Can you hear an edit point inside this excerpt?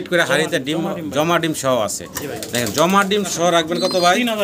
yes; 1 cut; at 3.3 s

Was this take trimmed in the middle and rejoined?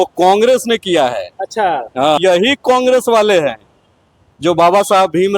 yes; 1 cut; at 2.2 s

